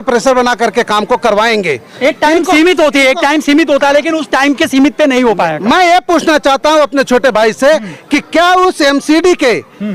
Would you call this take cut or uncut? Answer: uncut